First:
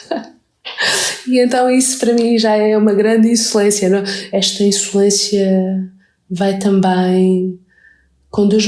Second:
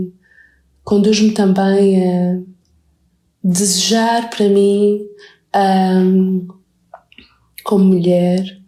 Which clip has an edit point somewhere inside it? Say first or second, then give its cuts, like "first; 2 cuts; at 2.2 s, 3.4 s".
first; 1 cut; at 4.2 s